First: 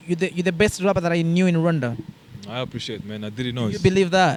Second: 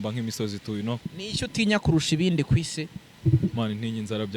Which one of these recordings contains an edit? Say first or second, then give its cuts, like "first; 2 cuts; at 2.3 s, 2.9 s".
second; 1 cut; at 1.0 s